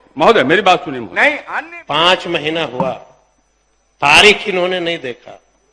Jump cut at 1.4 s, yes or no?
yes